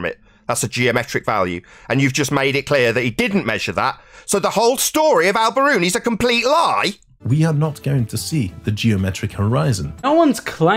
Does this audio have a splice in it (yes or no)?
yes